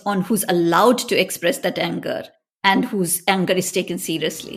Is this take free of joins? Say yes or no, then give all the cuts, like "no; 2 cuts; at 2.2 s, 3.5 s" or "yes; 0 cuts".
yes; 0 cuts